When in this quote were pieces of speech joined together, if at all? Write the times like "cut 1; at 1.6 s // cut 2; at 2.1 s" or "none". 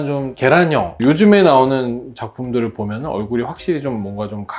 cut 1; at 0.9 s